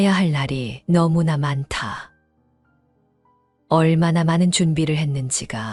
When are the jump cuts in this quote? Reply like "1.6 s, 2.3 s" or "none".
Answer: none